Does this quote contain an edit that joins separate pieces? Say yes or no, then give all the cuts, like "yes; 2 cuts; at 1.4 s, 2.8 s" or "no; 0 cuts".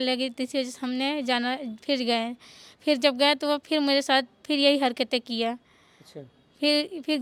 no; 0 cuts